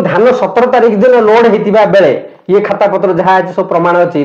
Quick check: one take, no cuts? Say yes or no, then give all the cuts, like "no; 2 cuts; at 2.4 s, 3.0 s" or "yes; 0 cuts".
yes; 0 cuts